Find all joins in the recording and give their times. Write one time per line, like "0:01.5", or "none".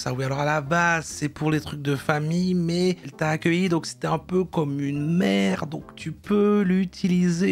none